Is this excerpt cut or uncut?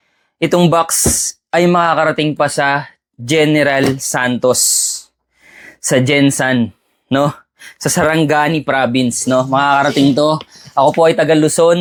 uncut